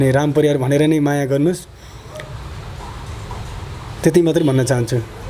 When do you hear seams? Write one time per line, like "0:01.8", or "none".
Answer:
none